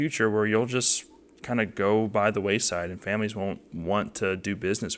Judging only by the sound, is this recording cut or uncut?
uncut